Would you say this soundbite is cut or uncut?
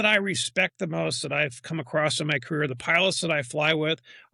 uncut